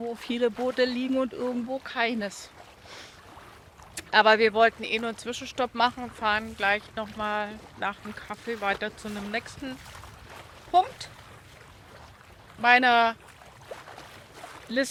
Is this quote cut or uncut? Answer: uncut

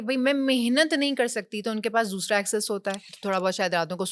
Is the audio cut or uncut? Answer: cut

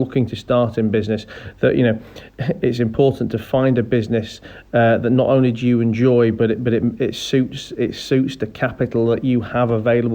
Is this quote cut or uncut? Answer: uncut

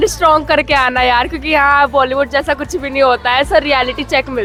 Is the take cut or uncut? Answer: uncut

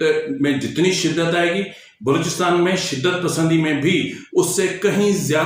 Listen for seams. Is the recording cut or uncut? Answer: uncut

